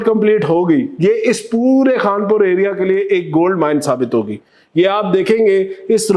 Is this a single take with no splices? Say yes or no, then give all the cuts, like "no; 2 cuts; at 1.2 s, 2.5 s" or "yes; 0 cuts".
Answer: yes; 0 cuts